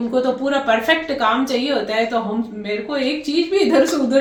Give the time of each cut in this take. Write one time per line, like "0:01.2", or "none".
none